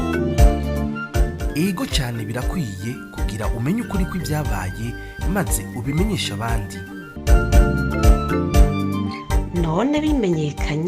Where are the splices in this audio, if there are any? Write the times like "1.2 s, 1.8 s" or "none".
1.1 s